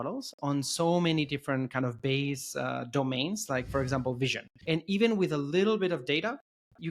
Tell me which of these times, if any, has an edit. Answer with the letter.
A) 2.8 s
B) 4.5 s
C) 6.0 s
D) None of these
B